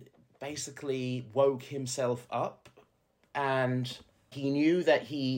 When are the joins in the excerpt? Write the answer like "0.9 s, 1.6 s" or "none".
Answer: none